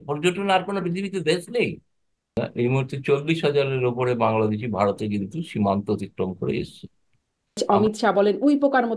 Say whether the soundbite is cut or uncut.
cut